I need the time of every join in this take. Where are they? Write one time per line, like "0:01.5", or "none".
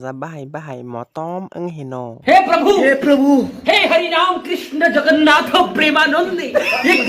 0:02.1